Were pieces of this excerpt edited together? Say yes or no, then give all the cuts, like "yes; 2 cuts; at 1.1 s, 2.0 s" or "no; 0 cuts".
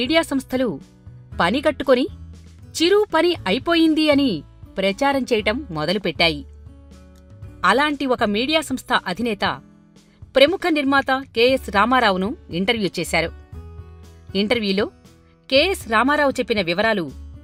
no; 0 cuts